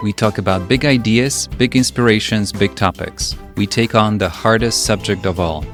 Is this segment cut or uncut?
uncut